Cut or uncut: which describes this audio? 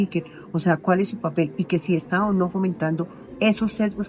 uncut